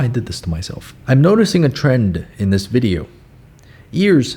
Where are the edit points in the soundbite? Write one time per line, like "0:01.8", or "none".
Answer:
0:00.9